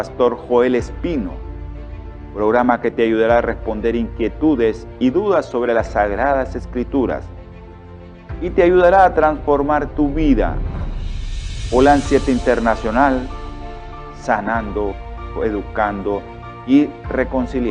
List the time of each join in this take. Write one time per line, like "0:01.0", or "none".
none